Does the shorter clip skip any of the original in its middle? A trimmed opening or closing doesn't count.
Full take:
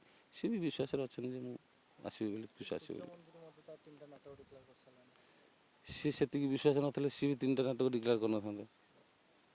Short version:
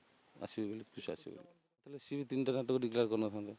yes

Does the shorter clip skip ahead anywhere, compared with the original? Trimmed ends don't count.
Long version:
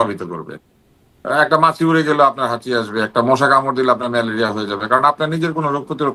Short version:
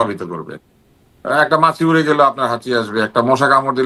no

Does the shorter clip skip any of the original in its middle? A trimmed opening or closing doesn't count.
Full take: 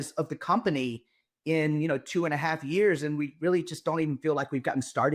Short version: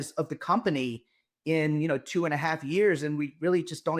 no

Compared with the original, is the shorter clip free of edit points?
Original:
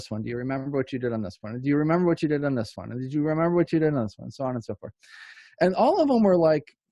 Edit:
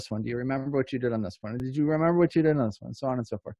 no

